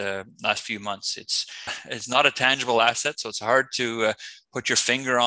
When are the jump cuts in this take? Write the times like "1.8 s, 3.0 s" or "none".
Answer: 1.8 s